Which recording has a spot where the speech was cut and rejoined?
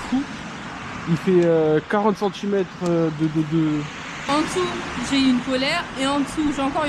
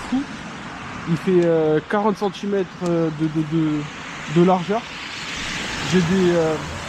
first; 1 cut; at 4.2 s

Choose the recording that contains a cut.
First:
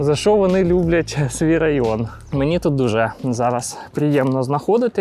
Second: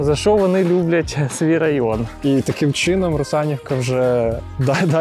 second; 1 cut; at 2.1 s

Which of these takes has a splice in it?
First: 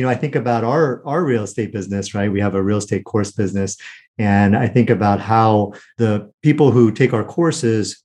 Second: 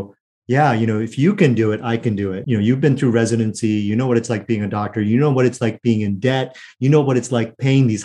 first; 1 cut; at 5.8 s

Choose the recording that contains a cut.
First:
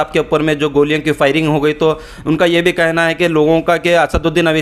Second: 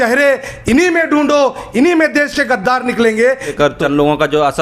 second; 1 cut; at 3.6 s

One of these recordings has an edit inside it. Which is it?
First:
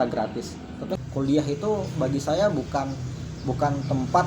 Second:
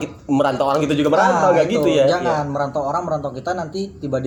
first; 1 cut; at 1.0 s

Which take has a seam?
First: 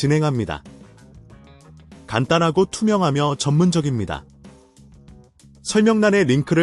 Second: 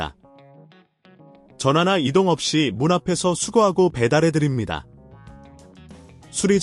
first; 2 cuts; at 4.2 s, 5.7 s

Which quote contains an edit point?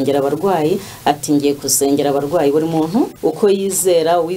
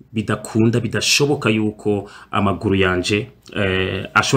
first; 1 cut; at 3.1 s

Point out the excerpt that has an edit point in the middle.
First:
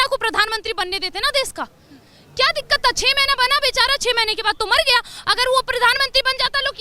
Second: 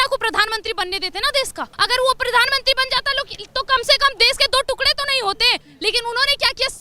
second; 2 cuts; at 1.7 s, 5.7 s

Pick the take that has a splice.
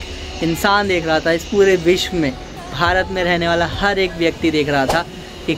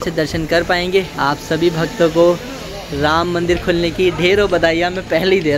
second; 1 cut; at 1.1 s

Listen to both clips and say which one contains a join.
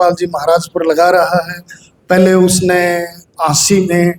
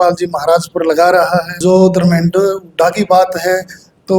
second; 1 cut; at 1.5 s

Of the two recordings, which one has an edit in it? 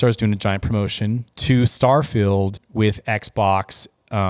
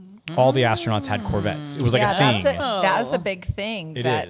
first; 2 cuts; at 1.3 s, 2.6 s

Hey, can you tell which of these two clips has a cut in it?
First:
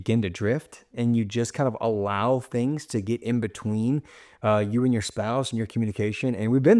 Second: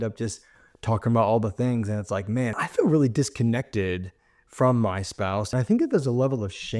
second; 2 cuts; at 2.6 s, 5.5 s

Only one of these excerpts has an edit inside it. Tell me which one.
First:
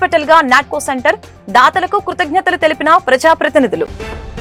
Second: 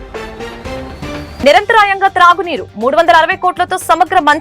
second; 1 cut; at 1.4 s

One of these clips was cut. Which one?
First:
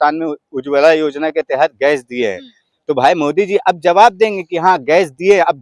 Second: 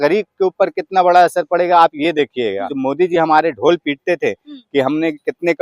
second; 1 cut; at 2.7 s

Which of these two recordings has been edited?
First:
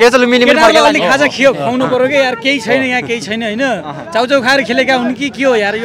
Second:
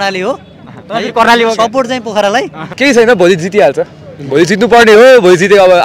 second; 1 cut; at 2.7 s

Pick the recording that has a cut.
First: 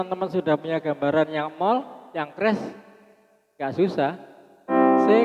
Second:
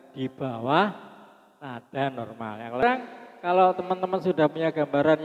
second; 1 cut; at 2.8 s

